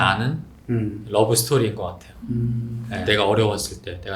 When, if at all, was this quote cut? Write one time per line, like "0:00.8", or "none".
0:03.0